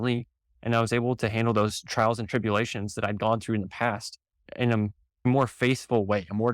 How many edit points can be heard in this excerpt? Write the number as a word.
one